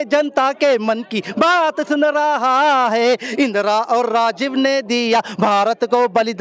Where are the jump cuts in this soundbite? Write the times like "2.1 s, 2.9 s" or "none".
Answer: none